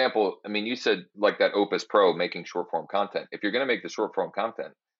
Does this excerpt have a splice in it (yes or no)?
yes